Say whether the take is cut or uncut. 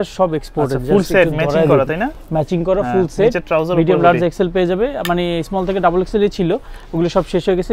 uncut